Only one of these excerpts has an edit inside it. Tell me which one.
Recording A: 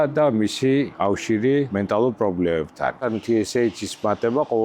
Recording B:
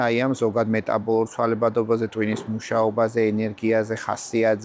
A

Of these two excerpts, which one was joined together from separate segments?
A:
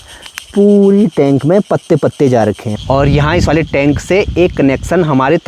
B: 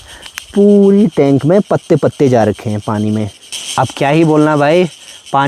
A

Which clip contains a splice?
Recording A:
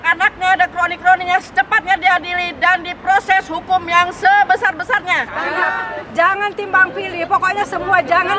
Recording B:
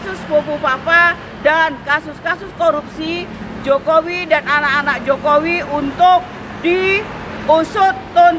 A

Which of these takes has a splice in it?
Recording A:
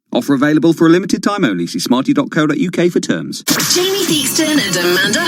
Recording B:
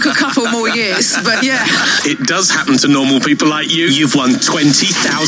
A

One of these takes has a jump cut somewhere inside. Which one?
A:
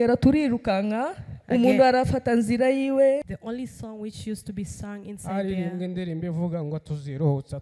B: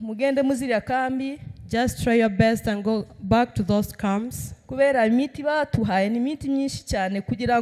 A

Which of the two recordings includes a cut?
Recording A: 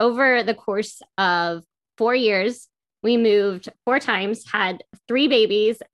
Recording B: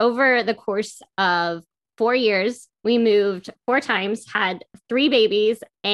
B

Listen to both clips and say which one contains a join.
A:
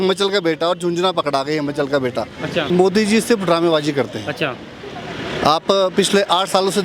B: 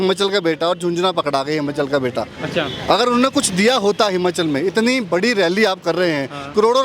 A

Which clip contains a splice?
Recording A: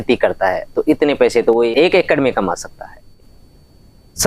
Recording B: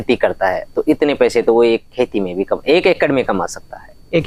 A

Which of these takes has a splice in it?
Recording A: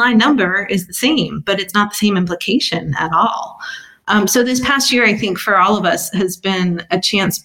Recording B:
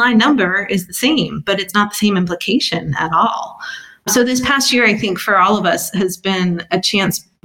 B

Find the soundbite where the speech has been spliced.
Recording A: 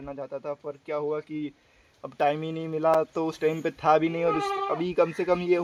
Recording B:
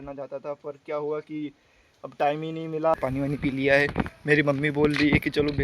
B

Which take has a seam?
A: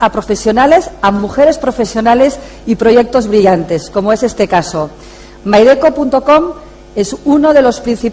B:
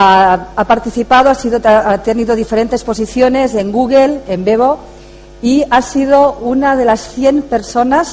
B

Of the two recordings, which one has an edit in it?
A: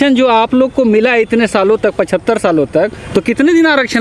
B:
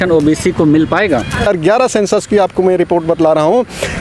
B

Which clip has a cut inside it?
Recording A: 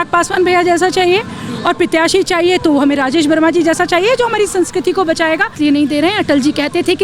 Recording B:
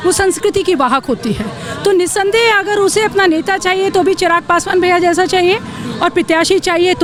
A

